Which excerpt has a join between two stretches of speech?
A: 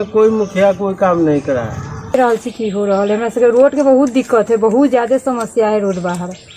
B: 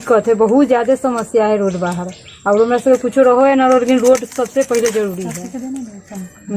A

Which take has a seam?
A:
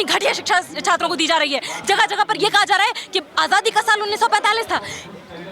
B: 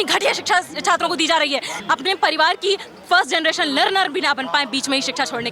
B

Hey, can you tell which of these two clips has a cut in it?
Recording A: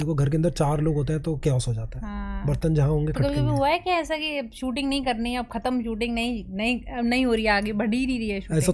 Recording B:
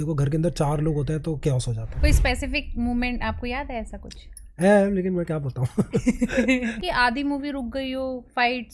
B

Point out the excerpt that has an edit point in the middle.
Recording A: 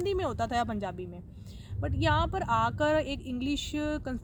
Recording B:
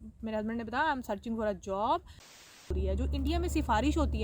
B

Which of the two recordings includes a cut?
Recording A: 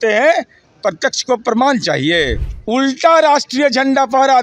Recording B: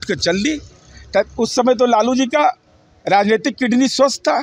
A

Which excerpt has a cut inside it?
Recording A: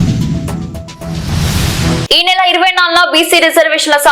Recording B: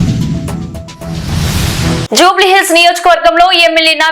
B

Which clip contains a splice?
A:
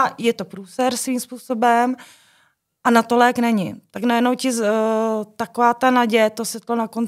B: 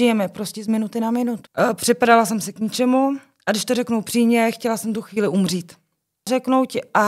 B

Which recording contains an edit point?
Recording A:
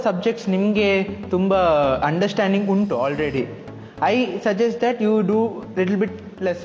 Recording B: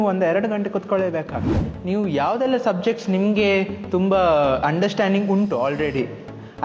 B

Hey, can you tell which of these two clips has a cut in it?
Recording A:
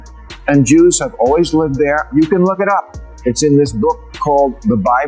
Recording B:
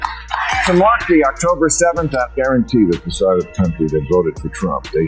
B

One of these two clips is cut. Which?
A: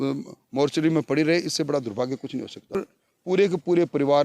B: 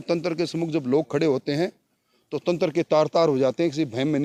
A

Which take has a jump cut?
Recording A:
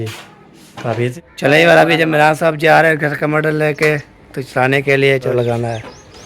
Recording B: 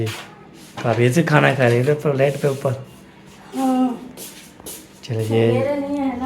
A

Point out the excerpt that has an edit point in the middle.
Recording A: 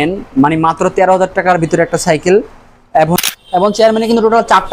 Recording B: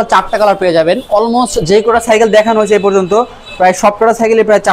A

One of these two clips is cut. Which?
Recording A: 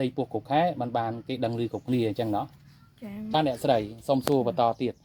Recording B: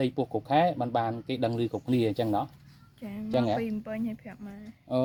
A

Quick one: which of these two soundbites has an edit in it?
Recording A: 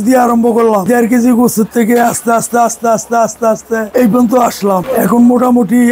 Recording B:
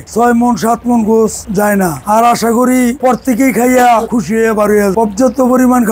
A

